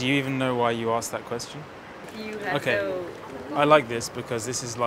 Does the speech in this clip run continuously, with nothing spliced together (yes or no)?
no